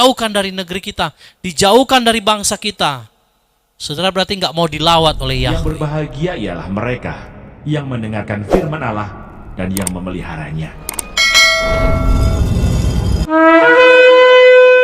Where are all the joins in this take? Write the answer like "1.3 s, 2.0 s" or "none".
5.5 s